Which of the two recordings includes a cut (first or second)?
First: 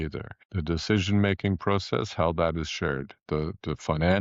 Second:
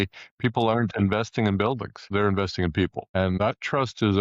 second